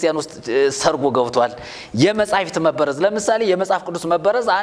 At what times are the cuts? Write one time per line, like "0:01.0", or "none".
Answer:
none